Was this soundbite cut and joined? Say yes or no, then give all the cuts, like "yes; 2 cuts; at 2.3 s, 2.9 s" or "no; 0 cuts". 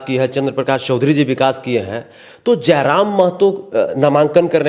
no; 0 cuts